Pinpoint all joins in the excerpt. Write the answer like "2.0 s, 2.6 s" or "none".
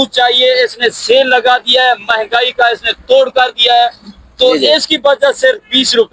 none